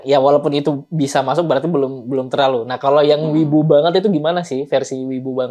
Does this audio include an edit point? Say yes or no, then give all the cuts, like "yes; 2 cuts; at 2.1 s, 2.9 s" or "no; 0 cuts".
no; 0 cuts